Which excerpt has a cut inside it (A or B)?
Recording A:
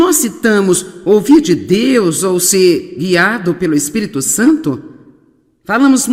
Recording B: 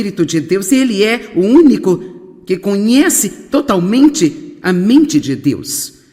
B